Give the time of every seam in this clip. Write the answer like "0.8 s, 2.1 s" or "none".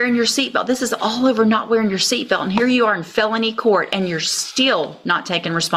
none

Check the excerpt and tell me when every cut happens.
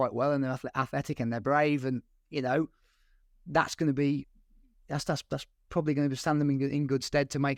none

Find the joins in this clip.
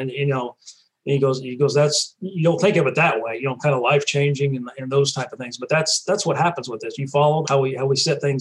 7.4 s

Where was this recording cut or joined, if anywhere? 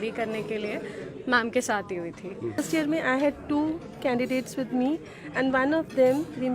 2.6 s

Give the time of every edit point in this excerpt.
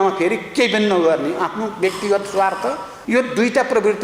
2.9 s

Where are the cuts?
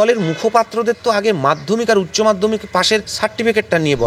3.1 s

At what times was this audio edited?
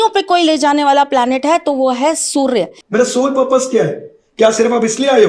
2.8 s

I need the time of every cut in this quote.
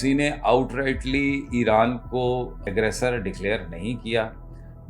2.6 s

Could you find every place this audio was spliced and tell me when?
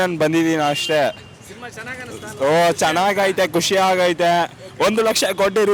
none

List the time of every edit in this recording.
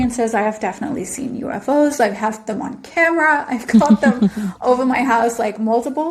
none

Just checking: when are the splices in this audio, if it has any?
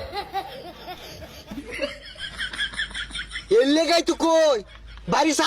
1.4 s, 3.4 s

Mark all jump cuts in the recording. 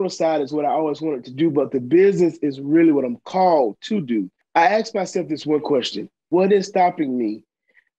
4.4 s, 6.2 s

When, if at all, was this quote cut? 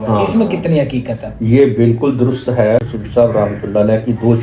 2.9 s

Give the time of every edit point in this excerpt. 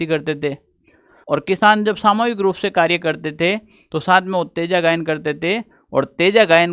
none

